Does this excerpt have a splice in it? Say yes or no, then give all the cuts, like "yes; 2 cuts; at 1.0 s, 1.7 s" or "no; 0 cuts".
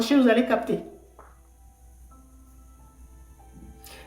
no; 0 cuts